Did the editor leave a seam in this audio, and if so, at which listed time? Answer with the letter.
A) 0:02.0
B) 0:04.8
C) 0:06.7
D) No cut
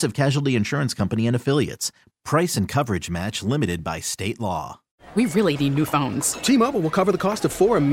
B